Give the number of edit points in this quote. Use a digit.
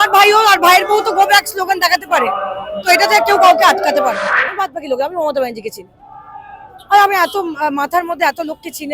1